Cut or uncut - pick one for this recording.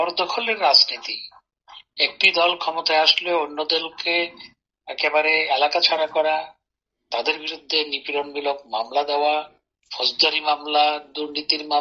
uncut